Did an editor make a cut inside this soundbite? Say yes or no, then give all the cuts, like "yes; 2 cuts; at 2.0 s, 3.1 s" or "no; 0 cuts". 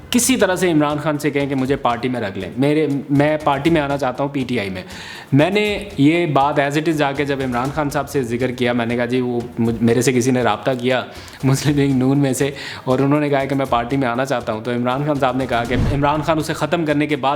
yes; 1 cut; at 15.9 s